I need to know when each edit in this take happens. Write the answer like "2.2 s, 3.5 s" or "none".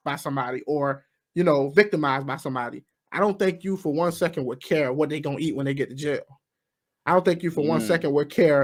none